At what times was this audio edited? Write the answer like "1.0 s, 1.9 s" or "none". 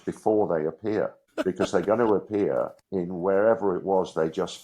1.3 s, 2.8 s